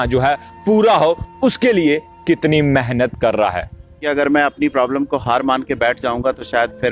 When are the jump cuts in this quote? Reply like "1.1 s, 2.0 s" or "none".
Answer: 4.0 s